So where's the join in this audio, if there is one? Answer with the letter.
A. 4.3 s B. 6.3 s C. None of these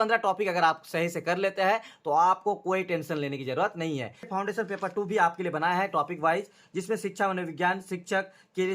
A